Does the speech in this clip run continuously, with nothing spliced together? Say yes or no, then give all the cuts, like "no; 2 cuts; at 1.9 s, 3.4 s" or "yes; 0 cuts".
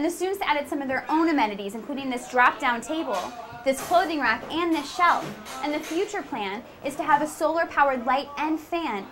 yes; 0 cuts